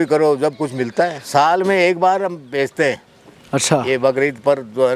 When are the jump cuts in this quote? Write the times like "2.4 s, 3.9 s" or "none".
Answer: 1.2 s